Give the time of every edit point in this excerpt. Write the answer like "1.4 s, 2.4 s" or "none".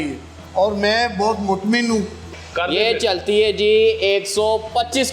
2.2 s